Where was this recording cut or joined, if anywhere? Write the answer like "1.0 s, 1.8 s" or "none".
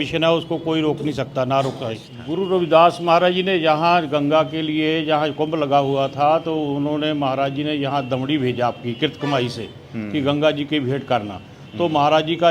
2.2 s